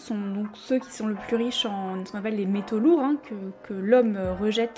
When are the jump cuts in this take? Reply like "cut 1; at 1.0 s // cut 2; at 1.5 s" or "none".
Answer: none